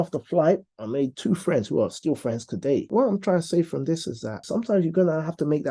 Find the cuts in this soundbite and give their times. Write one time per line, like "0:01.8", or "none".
0:02.9
0:04.4

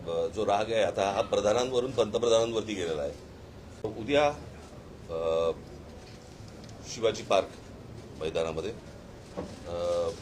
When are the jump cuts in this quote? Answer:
0:03.8

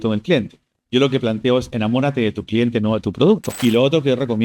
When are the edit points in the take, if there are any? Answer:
0:03.5

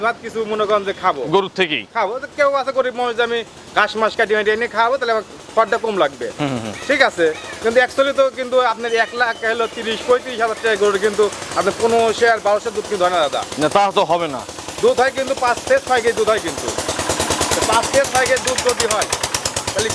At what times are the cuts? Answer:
none

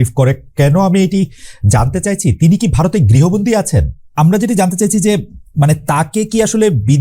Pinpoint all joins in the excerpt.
0:04.1

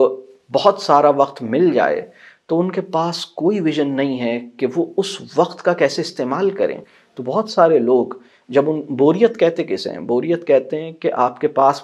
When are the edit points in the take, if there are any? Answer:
none

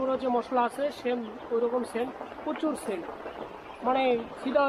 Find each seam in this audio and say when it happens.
none

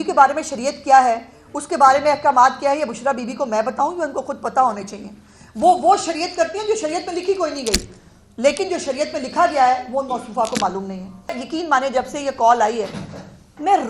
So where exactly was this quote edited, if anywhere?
0:11.5

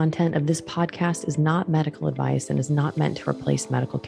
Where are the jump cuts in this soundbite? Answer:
none

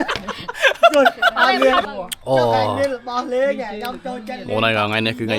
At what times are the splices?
0:01.8

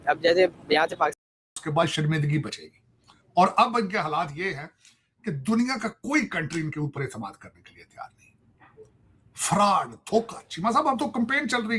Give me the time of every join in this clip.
0:01.2

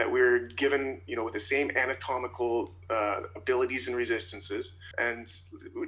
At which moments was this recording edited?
0:04.8

